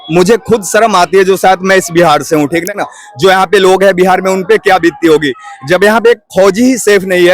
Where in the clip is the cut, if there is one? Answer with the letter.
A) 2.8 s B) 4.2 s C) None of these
A